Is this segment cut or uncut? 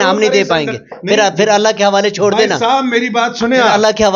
uncut